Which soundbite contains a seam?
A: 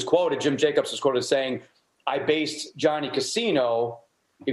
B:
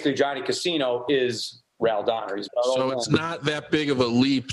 B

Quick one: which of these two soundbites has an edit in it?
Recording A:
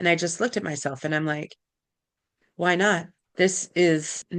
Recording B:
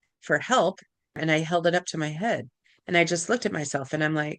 B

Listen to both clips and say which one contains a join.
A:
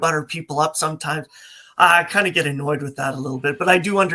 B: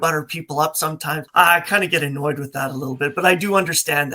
B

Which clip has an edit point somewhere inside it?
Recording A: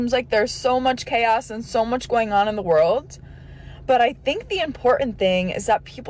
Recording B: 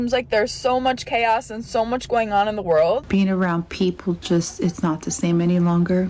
B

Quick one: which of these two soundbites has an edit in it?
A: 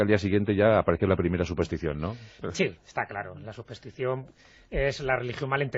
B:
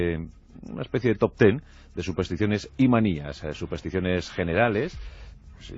A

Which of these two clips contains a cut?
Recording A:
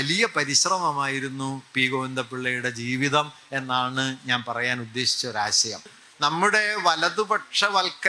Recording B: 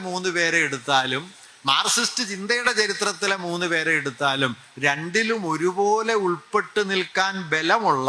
A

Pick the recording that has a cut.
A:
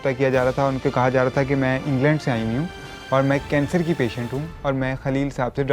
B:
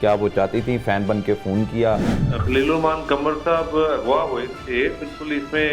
B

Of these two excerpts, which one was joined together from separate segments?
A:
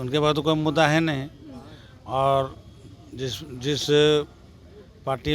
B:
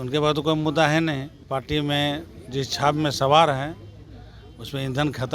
B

